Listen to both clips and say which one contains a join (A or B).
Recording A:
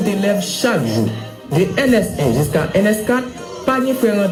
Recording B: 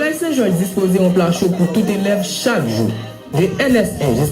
B